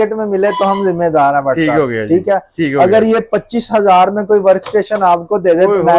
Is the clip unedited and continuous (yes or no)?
yes